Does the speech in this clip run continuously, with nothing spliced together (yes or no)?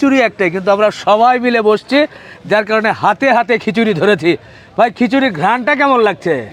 yes